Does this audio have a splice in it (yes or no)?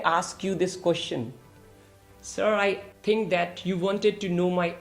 yes